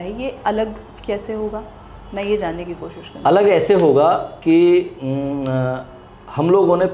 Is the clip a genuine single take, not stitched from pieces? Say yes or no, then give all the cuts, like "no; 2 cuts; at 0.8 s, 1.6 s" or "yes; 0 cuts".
yes; 0 cuts